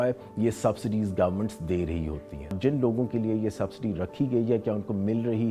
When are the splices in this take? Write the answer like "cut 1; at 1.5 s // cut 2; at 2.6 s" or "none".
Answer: cut 1; at 2.5 s